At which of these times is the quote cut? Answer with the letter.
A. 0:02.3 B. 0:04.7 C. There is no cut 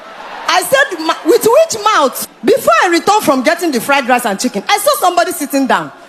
A